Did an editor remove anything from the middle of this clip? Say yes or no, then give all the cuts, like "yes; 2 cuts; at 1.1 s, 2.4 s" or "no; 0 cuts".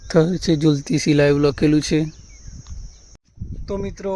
yes; 1 cut; at 3.2 s